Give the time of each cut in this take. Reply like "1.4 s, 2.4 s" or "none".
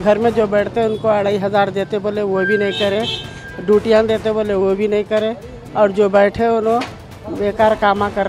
none